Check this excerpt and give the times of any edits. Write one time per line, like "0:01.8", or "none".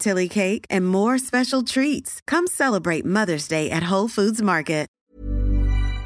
0:05.0